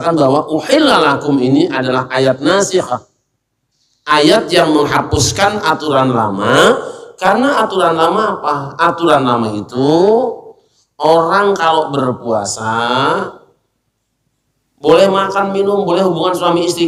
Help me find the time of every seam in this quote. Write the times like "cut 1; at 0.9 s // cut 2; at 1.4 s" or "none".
none